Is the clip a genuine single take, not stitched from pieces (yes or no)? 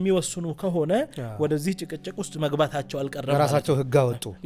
yes